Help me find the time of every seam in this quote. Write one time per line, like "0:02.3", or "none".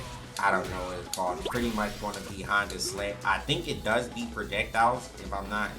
0:01.4